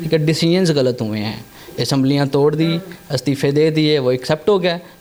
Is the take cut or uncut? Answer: uncut